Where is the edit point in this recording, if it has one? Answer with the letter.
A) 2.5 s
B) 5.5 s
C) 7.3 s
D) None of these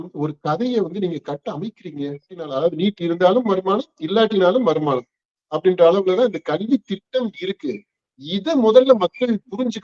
A